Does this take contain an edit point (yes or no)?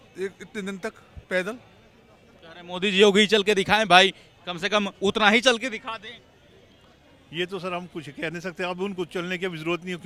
no